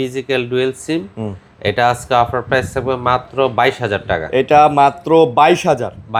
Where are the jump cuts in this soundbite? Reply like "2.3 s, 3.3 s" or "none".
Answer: none